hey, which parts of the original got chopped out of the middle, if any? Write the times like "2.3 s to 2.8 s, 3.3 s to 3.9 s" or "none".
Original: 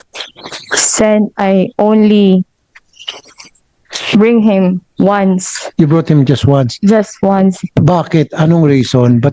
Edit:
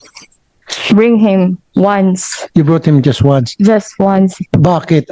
none